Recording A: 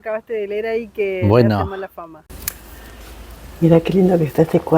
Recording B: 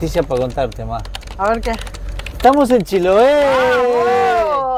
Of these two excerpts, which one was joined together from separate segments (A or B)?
A